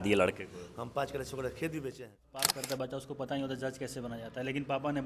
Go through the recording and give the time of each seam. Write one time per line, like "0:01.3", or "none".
0:02.5